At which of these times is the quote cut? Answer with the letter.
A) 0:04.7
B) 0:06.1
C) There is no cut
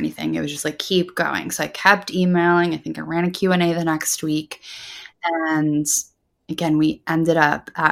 C